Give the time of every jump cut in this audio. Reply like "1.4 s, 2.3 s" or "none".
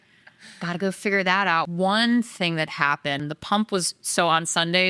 1.7 s, 3.2 s